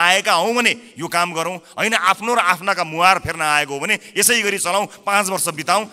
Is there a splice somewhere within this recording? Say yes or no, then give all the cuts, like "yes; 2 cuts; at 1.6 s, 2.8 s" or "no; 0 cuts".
no; 0 cuts